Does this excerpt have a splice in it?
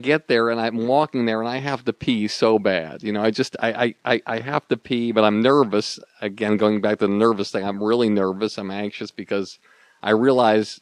no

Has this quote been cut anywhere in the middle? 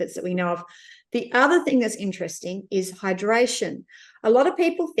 no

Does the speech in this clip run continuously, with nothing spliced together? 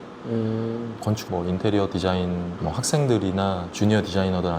no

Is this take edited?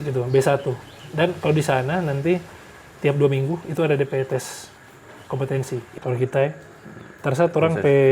yes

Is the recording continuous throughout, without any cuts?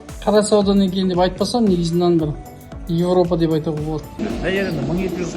no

